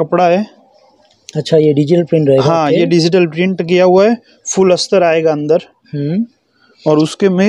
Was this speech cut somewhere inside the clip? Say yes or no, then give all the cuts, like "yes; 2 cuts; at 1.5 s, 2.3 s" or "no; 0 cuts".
no; 0 cuts